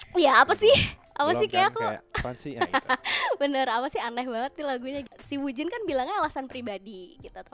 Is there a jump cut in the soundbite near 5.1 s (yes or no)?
yes